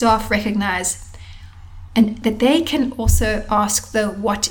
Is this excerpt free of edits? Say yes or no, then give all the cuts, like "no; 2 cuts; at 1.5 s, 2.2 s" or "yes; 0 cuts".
yes; 0 cuts